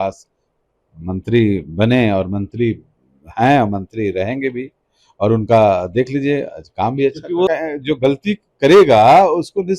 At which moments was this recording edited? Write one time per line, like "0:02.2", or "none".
0:07.5